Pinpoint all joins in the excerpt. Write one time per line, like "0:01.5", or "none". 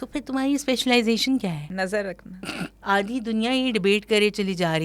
0:01.6
0:02.7